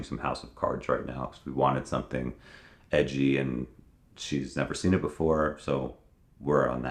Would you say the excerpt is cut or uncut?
uncut